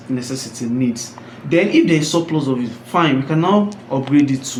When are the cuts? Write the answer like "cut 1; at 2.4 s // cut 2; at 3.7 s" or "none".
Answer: none

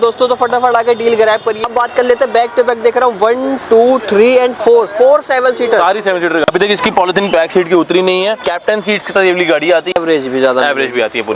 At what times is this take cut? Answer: cut 1; at 1.6 s // cut 2; at 6.4 s // cut 3; at 8.5 s // cut 4; at 9.9 s

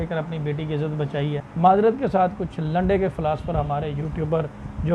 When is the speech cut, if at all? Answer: cut 1; at 1.4 s

